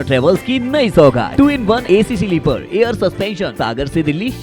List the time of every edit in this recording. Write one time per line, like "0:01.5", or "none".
0:01.4
0:03.5